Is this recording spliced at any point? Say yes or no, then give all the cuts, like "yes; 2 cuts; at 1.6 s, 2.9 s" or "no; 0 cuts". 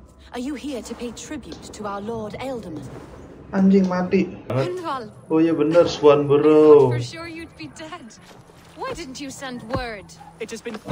yes; 1 cut; at 4.5 s